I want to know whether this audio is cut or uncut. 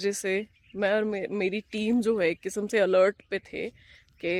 uncut